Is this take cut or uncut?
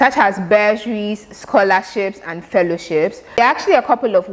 cut